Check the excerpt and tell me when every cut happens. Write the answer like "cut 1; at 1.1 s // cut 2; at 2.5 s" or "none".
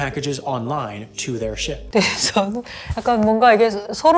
cut 1; at 1.8 s